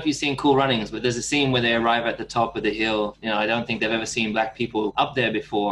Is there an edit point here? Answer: yes; 3 cuts; at 0.9 s, 3.2 s, 4.9 s

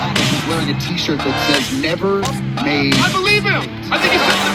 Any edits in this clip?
no; 0 cuts

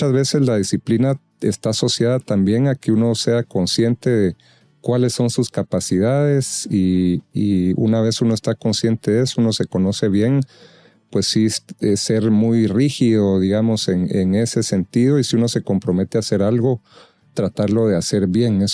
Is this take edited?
no; 0 cuts

